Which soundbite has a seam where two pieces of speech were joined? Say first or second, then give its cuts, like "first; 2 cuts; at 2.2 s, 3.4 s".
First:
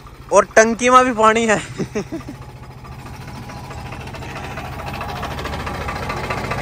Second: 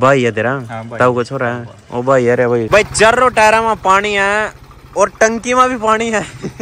second; 1 cut; at 2.7 s